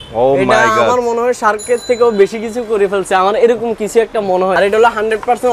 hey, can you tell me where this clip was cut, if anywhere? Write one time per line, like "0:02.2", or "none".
0:04.5